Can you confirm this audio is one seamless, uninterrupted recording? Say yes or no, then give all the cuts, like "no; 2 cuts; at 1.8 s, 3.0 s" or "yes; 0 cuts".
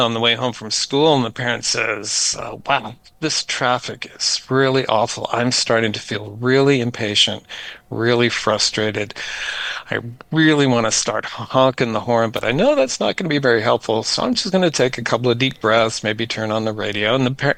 yes; 0 cuts